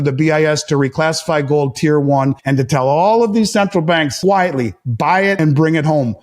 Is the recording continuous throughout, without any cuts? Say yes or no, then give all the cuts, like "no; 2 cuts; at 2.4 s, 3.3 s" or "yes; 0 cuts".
no; 3 cuts; at 2.4 s, 4.1 s, 5.4 s